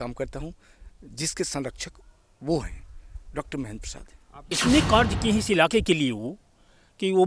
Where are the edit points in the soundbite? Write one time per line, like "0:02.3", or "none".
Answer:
0:04.5